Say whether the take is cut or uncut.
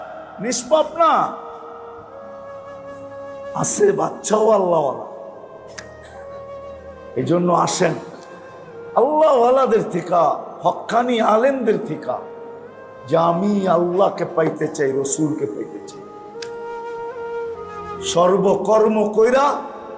cut